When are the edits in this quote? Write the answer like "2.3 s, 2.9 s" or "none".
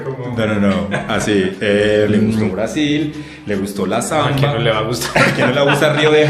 2.5 s